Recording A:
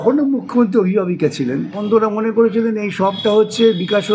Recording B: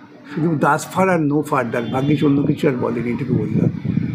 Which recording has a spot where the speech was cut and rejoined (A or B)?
A